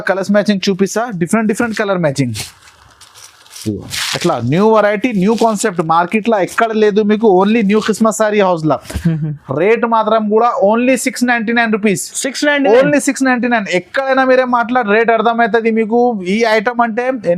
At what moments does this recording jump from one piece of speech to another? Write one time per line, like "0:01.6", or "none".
none